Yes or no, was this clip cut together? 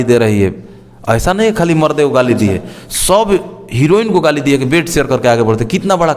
no